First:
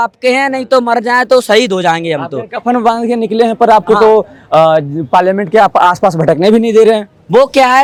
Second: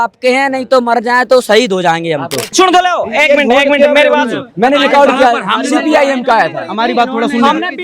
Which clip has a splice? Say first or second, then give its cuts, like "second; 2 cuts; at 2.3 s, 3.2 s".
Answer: second; 1 cut; at 2.5 s